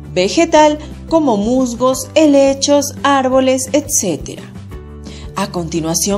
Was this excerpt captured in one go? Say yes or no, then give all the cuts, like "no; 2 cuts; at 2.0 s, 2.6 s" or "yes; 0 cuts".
yes; 0 cuts